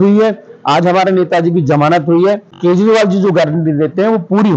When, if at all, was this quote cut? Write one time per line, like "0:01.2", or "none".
0:02.5